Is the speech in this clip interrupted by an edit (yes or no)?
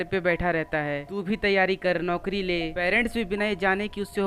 no